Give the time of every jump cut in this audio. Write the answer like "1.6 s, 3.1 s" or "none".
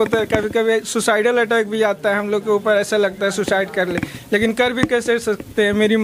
none